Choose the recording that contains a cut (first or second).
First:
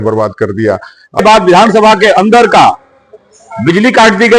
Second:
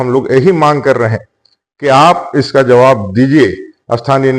first